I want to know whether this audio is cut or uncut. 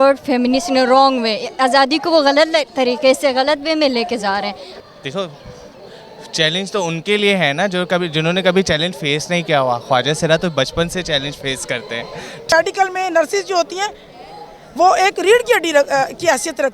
cut